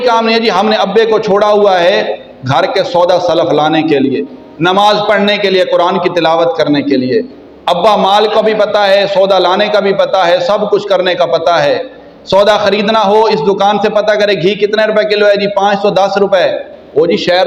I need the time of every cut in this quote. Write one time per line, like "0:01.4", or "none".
none